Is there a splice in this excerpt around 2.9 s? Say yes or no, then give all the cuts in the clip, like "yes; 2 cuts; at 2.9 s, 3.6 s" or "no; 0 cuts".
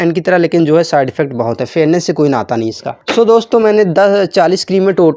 yes; 1 cut; at 2.9 s